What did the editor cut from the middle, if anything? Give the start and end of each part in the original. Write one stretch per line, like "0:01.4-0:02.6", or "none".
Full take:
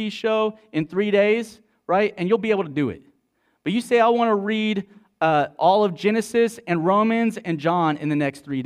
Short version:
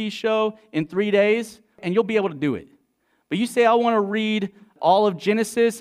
0:01.8-0:02.2
0:05.1-0:05.5